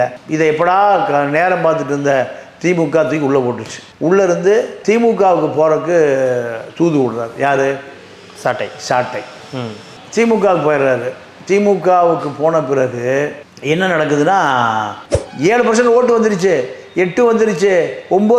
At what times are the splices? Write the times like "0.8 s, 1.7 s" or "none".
15.0 s

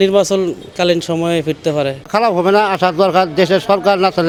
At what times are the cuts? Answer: none

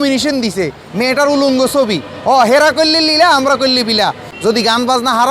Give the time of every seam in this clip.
4.3 s

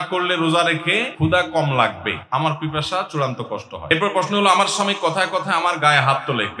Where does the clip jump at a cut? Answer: 1.1 s, 2.1 s, 3.9 s

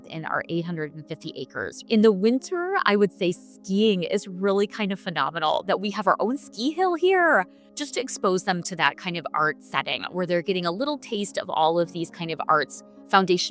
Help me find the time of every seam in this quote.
1.8 s, 7.6 s

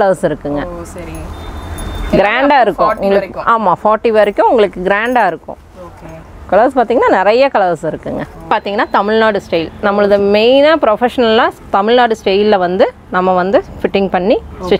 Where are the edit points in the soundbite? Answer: 8.5 s

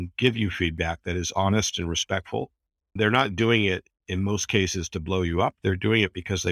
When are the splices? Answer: 3.0 s

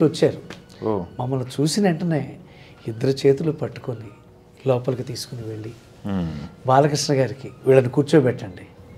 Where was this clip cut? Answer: none

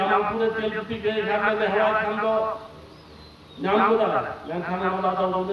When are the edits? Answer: none

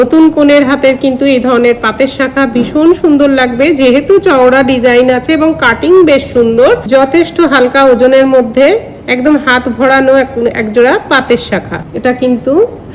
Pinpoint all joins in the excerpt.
6.9 s, 11.8 s

